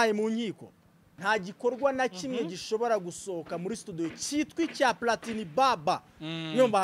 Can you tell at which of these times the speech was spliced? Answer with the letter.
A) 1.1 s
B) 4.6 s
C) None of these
A